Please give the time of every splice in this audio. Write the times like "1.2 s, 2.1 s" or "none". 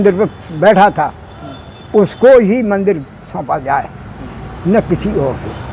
none